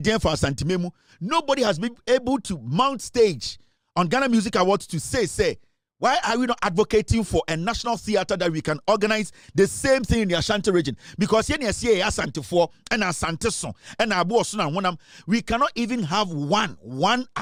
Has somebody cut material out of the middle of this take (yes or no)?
no